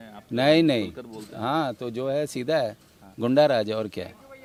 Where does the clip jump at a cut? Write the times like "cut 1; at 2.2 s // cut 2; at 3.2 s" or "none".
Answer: none